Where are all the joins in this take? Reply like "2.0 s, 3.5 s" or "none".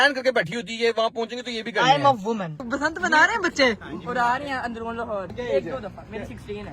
2.6 s, 5.3 s